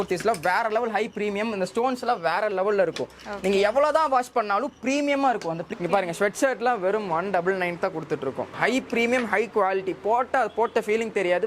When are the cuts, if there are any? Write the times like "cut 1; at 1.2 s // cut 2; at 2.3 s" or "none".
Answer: cut 1; at 5.6 s // cut 2; at 8.5 s